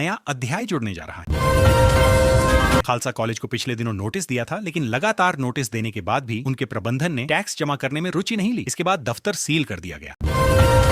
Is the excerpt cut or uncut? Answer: cut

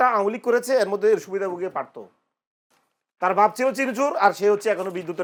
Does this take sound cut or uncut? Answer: uncut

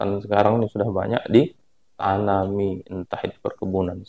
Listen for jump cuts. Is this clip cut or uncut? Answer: uncut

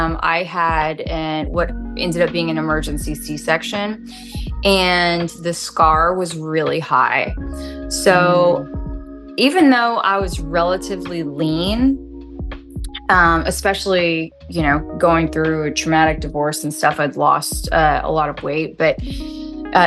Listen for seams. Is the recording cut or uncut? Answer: uncut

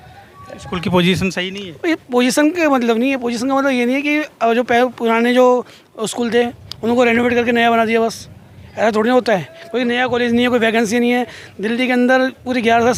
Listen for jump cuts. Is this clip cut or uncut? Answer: uncut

